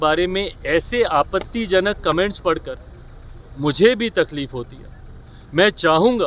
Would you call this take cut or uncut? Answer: uncut